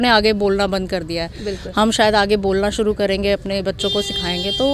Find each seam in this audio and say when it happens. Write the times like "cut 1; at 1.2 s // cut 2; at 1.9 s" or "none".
none